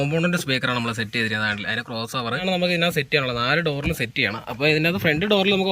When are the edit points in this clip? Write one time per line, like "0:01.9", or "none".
0:02.4